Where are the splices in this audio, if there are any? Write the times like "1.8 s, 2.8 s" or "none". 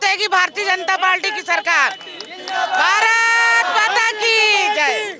none

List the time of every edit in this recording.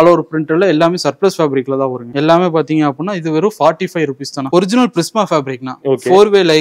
2.0 s, 4.5 s

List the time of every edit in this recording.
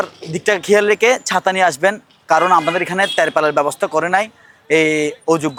none

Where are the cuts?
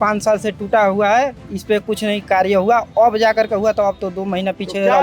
none

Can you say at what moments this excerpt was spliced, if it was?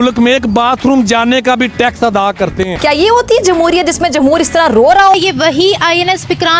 2.7 s, 5.1 s

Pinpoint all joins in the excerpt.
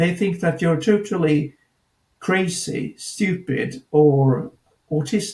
none

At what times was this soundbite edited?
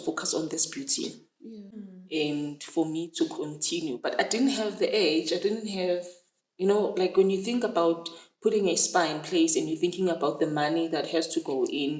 1.7 s

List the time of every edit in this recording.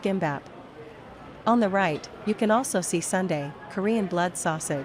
none

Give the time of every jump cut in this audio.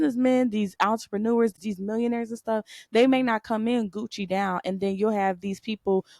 1.6 s

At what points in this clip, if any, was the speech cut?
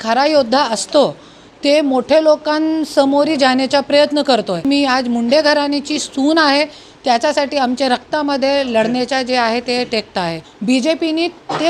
4.6 s, 10.5 s

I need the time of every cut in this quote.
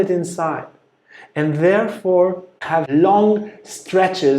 2.7 s

